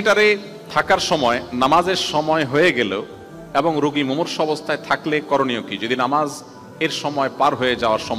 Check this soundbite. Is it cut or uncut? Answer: uncut